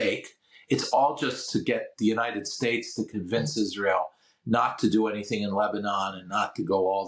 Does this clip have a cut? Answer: no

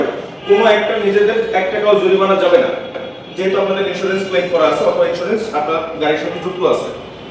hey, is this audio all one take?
yes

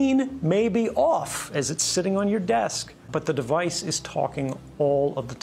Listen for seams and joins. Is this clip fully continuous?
no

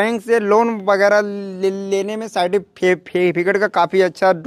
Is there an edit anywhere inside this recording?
no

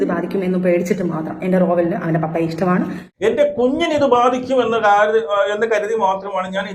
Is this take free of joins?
no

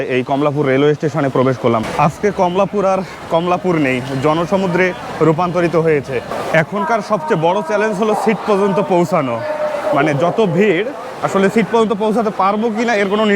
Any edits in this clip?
yes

